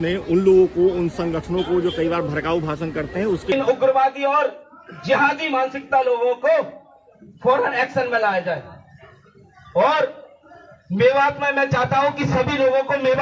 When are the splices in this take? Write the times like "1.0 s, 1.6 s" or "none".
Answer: 3.5 s

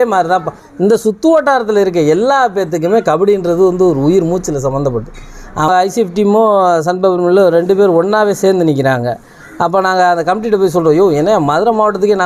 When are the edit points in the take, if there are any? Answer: 5.7 s

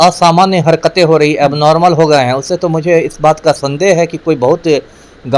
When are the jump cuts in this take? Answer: none

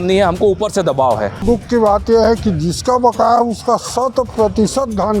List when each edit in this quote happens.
1.4 s

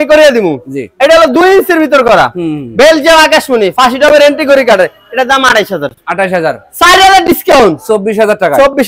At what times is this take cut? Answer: none

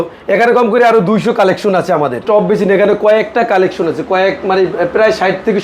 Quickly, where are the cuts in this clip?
2.2 s

